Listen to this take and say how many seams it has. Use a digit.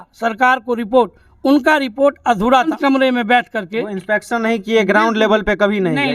1